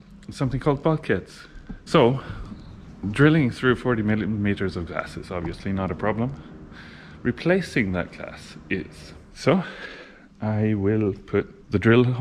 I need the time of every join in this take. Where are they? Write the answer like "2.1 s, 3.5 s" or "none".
1.2 s, 8.9 s